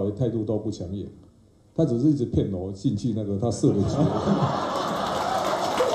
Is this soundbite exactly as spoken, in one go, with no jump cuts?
yes; 0 cuts

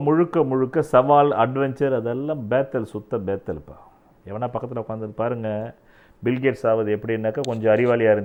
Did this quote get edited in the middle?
no; 0 cuts

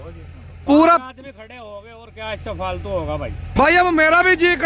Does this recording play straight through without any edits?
no; 1 cut; at 3.6 s

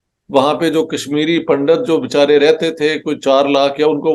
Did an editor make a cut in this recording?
no; 0 cuts

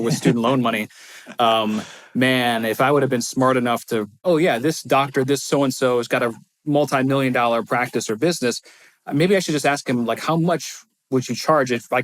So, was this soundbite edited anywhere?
yes; 1 cut; at 4.2 s

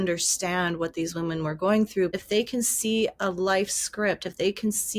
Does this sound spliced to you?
yes; 1 cut; at 2.2 s

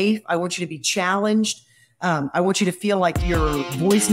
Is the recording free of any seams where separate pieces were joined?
no; 1 cut; at 3.2 s

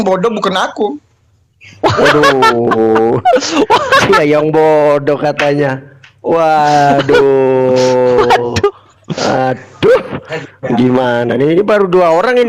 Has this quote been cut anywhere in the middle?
no; 0 cuts

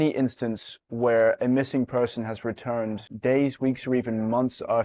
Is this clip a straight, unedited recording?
yes; 0 cuts

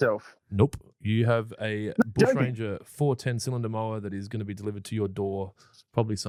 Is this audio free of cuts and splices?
yes; 0 cuts

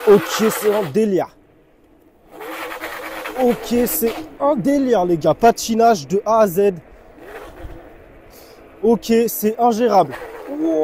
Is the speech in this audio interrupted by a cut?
no; 0 cuts

